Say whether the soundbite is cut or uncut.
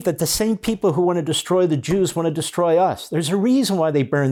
uncut